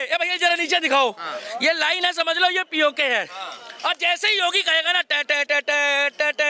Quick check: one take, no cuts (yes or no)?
yes